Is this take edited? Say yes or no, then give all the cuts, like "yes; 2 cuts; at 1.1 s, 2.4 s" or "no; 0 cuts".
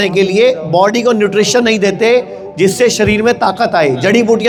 no; 0 cuts